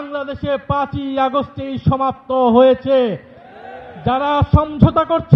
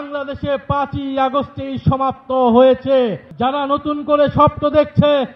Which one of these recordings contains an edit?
second; 1 cut; at 3.2 s

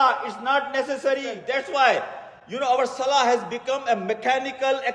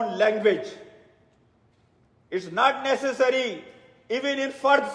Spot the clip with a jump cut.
first; 1 cut; at 1.4 s

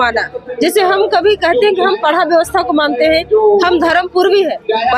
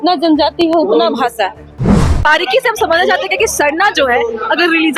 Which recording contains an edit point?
second; 1 cut; at 2.0 s

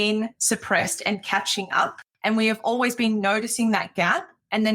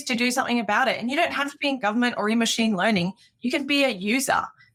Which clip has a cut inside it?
first; 1 cut; at 2.1 s

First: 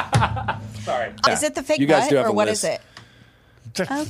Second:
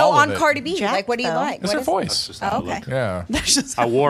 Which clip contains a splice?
first; 1 cut; at 1.3 s

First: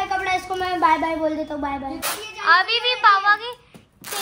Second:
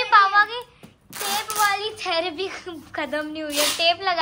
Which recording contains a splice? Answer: first; 1 cut; at 2.0 s

